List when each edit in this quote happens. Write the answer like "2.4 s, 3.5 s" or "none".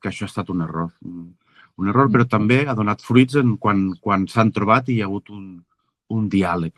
none